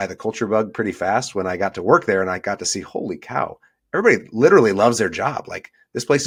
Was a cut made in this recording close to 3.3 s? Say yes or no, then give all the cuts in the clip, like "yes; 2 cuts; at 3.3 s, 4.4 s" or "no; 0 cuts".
no; 0 cuts